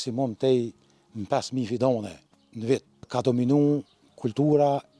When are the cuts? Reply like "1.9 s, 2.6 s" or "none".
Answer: 3.0 s

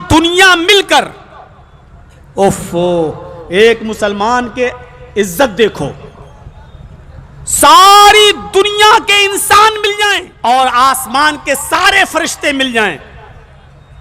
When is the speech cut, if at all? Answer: 10.3 s

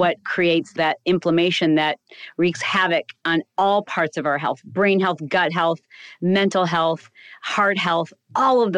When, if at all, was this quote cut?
none

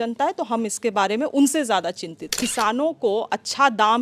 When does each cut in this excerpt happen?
2.3 s

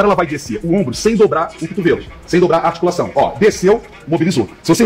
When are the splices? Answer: none

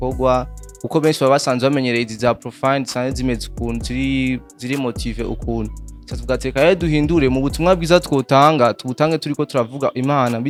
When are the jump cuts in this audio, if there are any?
none

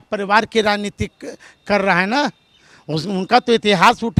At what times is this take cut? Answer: none

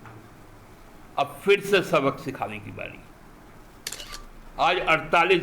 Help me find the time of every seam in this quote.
4.0 s

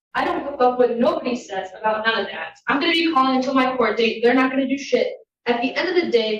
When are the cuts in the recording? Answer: none

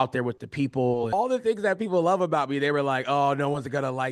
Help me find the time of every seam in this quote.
1.1 s

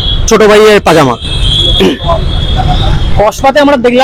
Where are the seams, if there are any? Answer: none

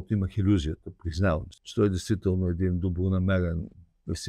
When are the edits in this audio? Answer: 1.6 s

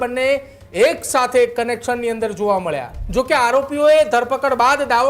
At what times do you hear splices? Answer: 2.9 s

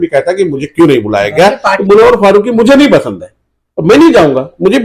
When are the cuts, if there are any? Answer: 1.7 s

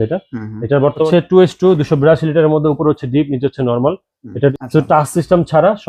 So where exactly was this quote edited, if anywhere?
1.1 s, 4.5 s

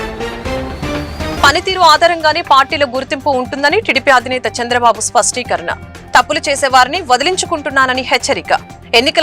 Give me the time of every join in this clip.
none

